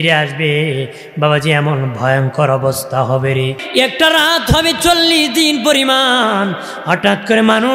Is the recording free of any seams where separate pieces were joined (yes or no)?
no